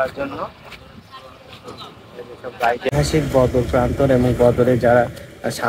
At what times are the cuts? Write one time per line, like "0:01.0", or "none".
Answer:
0:02.9